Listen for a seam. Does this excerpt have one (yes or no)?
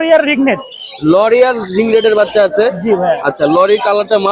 no